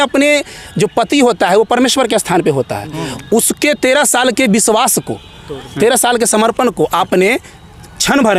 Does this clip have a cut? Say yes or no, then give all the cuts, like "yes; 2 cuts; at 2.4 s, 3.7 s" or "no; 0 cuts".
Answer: no; 0 cuts